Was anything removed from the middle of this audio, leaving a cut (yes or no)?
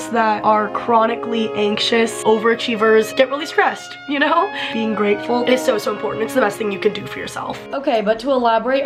no